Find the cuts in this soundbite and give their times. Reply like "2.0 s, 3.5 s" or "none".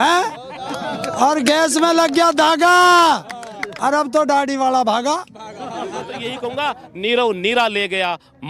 6.3 s